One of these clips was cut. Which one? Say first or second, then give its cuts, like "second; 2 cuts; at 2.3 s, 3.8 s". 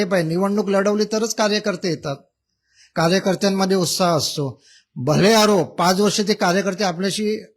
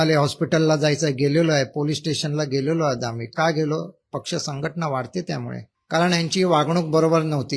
second; 1 cut; at 5.7 s